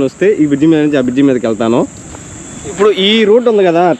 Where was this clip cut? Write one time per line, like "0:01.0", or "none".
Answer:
0:02.8